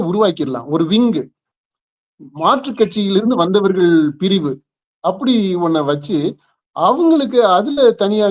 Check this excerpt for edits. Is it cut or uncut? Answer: uncut